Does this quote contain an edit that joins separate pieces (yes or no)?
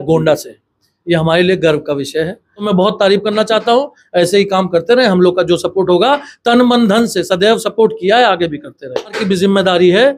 yes